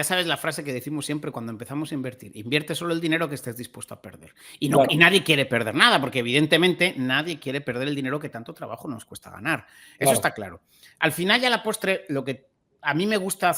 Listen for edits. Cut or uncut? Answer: uncut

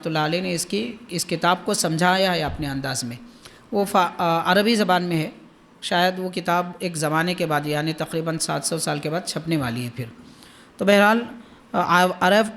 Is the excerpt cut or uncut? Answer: uncut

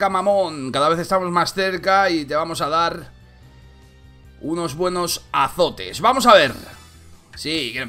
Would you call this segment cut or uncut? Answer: cut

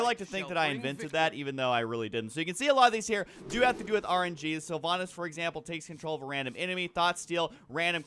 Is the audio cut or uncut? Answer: uncut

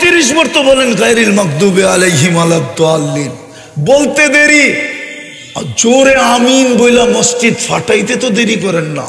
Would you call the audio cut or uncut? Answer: uncut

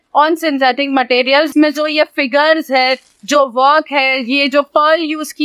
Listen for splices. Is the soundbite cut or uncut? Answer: cut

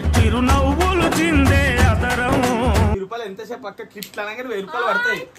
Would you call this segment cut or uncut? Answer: cut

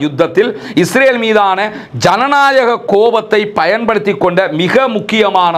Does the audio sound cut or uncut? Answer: uncut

